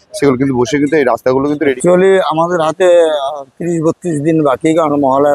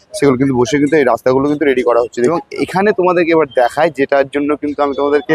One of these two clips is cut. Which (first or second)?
first